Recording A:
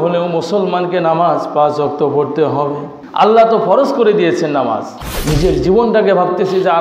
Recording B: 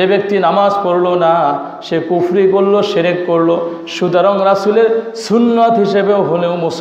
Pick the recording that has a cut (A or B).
A